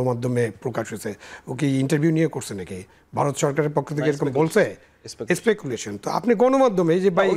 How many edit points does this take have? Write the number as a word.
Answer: zero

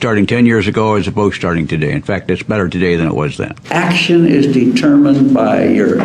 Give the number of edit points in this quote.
one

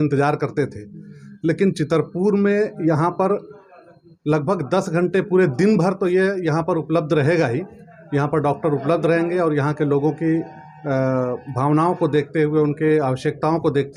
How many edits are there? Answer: zero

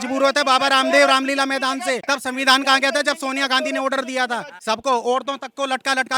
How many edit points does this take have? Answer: one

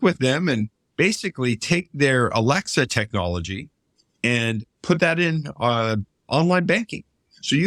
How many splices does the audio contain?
zero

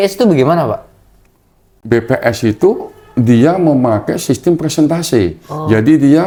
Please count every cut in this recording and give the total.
zero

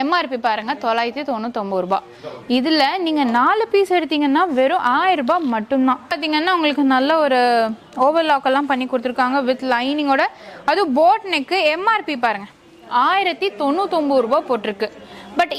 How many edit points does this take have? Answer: one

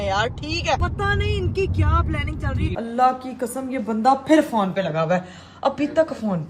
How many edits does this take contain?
two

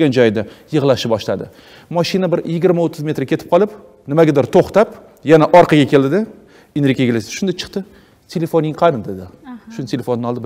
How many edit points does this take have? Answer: zero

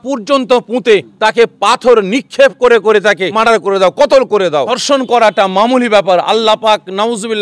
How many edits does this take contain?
three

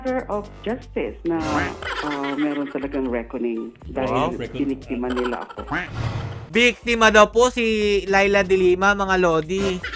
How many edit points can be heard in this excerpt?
zero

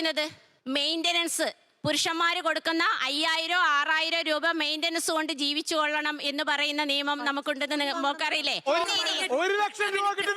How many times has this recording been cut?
one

